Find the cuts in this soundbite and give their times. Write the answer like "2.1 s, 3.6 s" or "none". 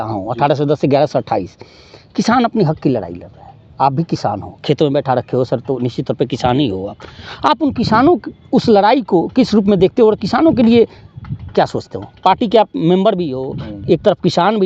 none